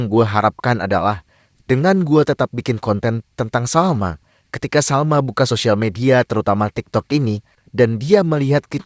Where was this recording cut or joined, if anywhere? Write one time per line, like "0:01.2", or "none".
none